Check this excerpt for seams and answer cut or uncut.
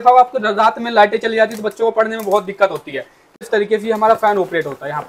cut